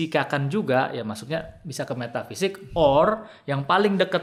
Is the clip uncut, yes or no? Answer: yes